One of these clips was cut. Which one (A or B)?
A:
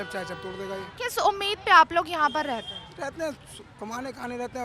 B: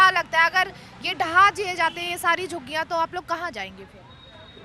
A